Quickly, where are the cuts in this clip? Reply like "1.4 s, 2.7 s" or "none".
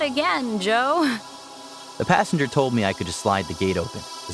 1.2 s